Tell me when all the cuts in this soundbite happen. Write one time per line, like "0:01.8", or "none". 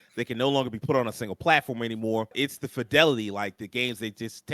0:02.3

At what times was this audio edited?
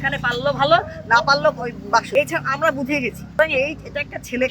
0:02.1
0:03.4

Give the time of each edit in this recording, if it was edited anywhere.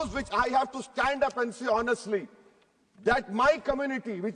none

